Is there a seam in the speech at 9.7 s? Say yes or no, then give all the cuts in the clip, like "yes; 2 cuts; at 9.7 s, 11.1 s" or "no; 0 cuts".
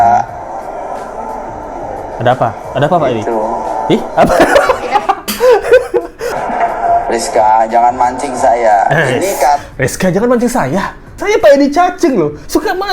no; 2 cuts; at 6.3 s, 11.1 s